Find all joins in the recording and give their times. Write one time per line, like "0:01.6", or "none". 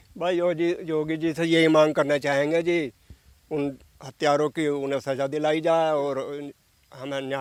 none